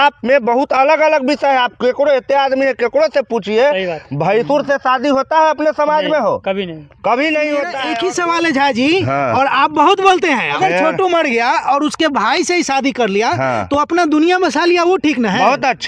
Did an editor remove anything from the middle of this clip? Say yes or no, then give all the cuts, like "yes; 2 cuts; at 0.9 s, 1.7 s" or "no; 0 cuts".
yes; 2 cuts; at 7.8 s, 10.6 s